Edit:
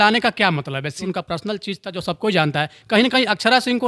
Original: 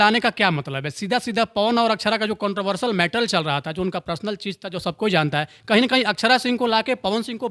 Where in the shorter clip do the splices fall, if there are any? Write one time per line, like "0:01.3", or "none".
0:01.0